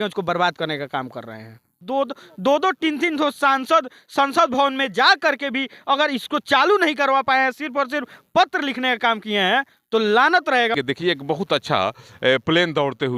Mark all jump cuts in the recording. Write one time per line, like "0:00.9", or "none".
0:01.8
0:10.7